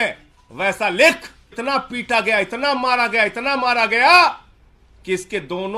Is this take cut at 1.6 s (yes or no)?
yes